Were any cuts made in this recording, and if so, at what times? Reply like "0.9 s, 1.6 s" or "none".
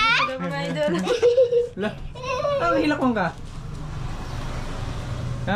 none